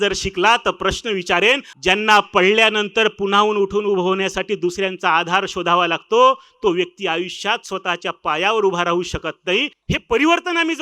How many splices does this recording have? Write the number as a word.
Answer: two